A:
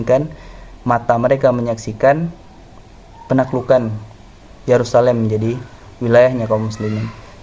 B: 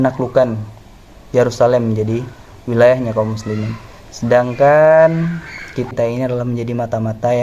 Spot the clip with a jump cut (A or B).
B